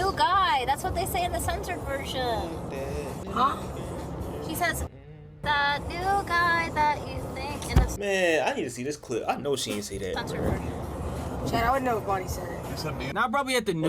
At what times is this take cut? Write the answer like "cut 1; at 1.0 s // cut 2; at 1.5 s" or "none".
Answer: none